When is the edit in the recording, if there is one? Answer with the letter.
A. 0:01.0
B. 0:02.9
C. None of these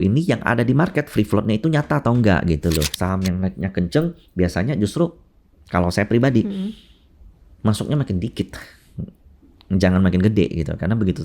B